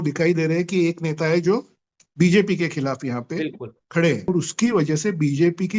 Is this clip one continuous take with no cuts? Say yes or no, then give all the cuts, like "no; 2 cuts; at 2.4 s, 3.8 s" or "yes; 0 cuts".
no; 1 cut; at 4.3 s